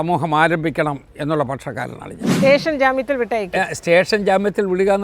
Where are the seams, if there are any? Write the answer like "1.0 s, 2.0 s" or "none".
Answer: 2.2 s